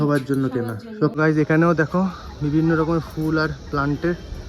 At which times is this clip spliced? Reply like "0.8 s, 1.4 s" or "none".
1.1 s